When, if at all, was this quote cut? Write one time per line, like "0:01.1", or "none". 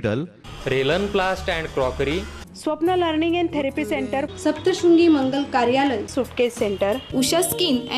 none